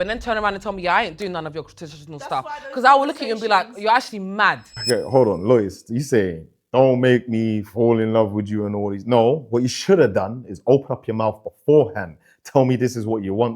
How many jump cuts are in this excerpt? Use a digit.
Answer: 1